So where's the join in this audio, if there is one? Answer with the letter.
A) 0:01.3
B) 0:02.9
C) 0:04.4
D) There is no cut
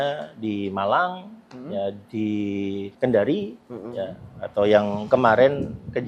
B